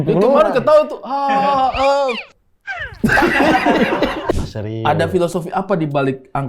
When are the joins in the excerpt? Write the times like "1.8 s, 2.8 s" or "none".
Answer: 4.4 s